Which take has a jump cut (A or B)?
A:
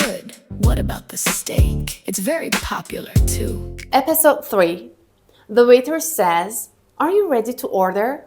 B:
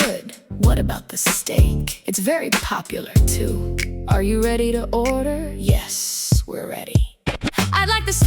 B